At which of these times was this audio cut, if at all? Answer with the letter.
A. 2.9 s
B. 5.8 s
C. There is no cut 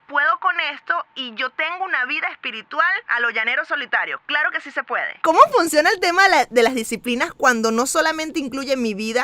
C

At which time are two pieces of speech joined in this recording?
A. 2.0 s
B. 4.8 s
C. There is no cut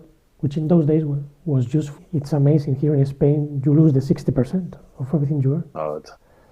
A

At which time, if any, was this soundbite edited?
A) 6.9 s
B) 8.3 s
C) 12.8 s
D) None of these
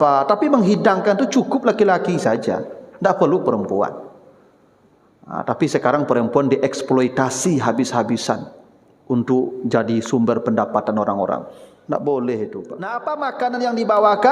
C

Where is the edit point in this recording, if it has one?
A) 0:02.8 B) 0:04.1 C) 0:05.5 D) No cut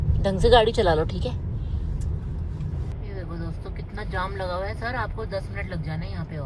D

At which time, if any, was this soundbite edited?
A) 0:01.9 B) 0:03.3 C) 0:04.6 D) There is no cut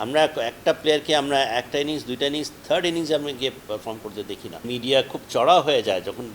C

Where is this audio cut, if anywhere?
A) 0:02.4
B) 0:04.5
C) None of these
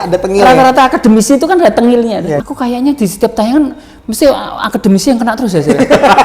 A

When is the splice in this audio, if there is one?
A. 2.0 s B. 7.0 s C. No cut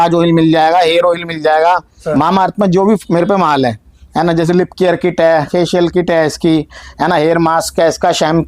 A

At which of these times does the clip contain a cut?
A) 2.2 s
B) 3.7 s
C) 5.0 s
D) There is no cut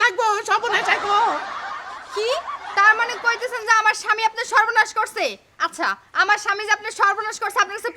D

